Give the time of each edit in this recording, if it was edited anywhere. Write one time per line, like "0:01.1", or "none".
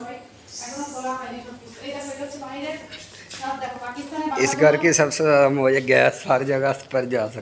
none

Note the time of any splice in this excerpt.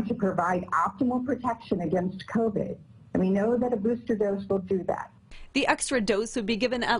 0:05.2

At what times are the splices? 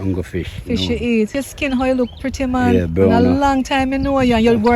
0:01.3

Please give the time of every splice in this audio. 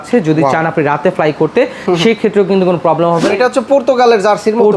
0:03.3

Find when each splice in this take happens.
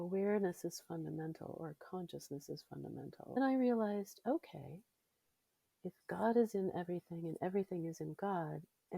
0:03.4

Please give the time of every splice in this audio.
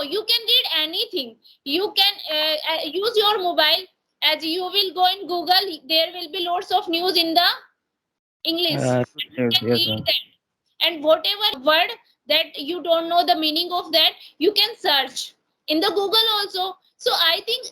0:11.5

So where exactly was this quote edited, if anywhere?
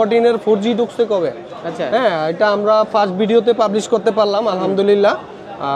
none

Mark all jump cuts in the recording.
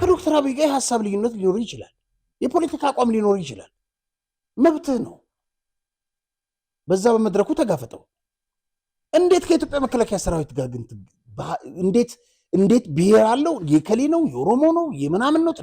none

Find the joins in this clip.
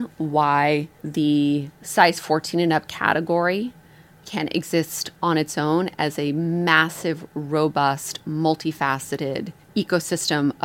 0:01.0
0:01.8
0:04.2
0:09.6

